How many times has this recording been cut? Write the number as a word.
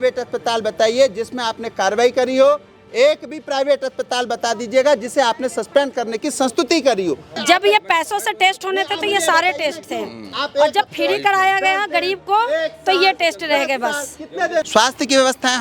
two